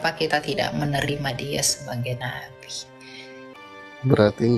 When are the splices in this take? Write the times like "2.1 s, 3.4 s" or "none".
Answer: 3.5 s